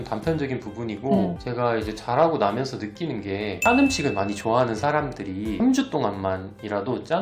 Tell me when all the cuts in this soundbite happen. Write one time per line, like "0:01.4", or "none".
0:01.4
0:03.7
0:05.5

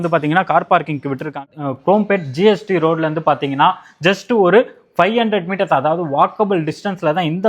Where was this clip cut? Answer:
0:01.5

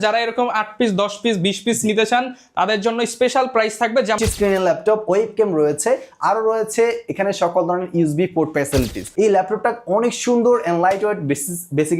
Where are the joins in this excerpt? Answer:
0:04.2
0:09.0

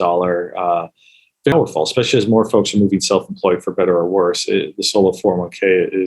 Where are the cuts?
0:01.5

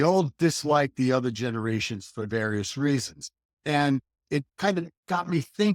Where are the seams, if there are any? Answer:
0:04.5

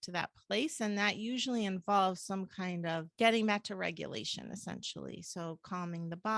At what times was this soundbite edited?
0:03.1

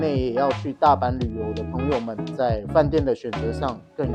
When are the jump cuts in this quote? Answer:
none

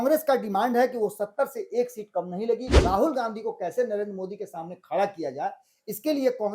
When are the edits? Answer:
0:02.7

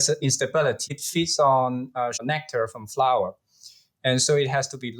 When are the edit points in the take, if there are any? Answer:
0:01.0
0:02.2

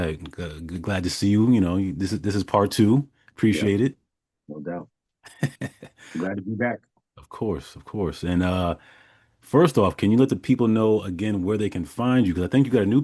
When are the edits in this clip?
none

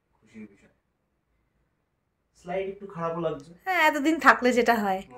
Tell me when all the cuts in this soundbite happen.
none

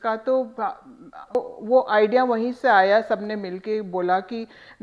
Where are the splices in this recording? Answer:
0:01.4

